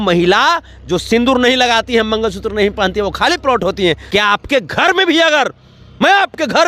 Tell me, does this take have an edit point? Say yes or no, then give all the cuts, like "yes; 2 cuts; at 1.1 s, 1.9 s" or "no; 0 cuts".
yes; 1 cut; at 4.0 s